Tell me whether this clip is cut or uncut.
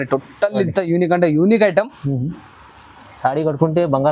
uncut